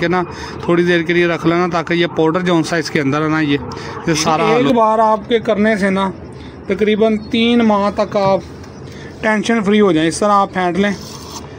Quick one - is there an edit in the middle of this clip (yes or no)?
yes